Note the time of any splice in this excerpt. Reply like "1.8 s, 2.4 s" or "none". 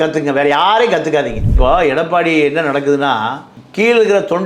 1.6 s